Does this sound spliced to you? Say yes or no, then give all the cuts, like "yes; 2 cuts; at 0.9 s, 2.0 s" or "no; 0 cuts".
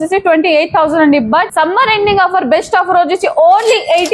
yes; 1 cut; at 1.5 s